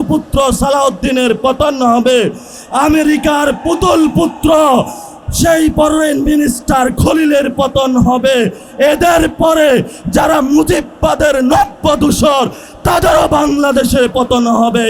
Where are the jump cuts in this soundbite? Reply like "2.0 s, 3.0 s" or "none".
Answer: none